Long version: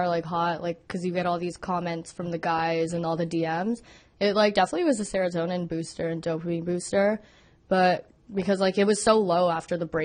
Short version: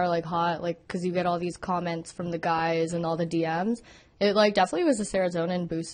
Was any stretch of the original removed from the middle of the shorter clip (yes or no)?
no